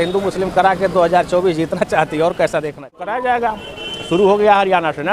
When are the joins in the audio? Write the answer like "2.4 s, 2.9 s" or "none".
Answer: 2.9 s